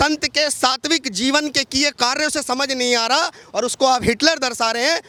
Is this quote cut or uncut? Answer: uncut